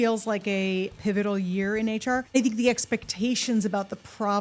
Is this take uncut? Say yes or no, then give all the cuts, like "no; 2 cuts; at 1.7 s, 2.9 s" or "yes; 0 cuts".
no; 2 cuts; at 0.9 s, 2.4 s